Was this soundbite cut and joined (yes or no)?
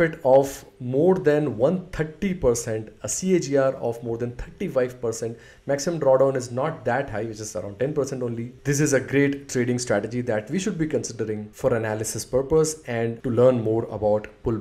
no